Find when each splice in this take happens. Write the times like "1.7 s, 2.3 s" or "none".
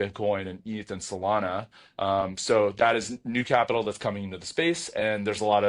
none